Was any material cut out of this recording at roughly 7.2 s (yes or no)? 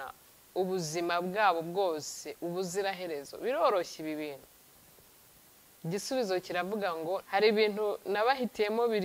yes